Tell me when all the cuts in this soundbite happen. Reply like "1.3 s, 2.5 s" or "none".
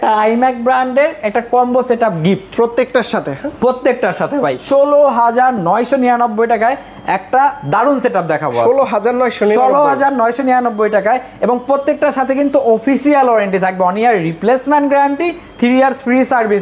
4.6 s